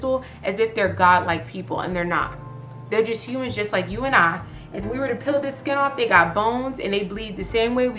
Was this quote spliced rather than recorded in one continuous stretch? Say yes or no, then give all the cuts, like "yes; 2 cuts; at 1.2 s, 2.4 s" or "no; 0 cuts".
no; 0 cuts